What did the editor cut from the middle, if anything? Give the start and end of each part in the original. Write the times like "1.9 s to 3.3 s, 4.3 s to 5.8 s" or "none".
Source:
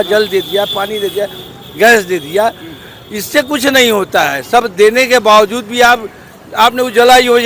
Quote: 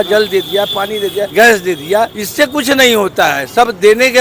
1.3 s to 1.7 s, 2.7 s to 3.2 s